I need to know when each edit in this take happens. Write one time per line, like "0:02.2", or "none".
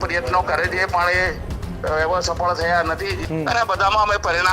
0:03.2